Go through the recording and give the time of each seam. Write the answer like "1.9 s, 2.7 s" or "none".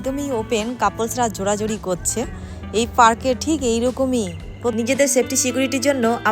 4.7 s